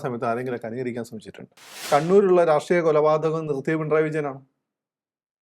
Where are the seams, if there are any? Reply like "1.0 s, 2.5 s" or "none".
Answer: 1.8 s